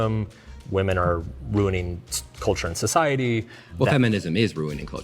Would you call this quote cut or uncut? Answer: cut